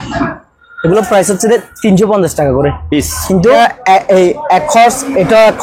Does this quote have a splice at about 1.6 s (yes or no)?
no